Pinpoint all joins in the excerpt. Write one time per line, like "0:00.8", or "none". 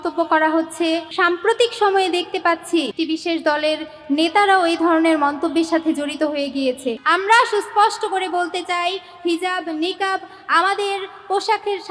0:01.1
0:02.9
0:07.0